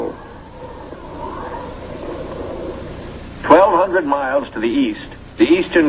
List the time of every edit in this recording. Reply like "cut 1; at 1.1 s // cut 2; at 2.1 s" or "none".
cut 1; at 4.2 s